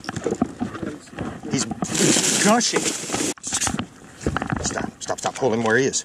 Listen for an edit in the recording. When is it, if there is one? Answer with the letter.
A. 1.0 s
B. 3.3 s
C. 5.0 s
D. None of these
B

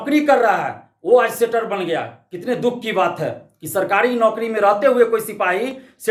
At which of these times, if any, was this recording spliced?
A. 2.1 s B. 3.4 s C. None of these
C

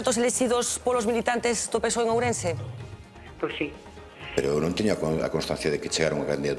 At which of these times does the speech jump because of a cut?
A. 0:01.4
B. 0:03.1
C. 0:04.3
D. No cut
C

